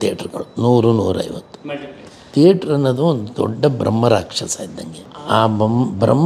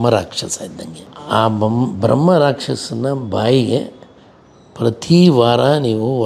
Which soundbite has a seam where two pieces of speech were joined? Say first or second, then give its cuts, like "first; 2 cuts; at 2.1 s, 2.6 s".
first; 1 cut; at 2.2 s